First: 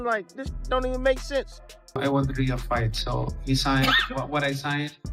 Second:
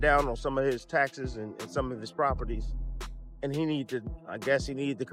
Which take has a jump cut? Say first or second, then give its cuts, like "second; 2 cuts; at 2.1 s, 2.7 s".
first; 1 cut; at 2.0 s